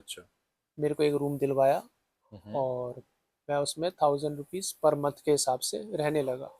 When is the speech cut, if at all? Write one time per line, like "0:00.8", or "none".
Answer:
none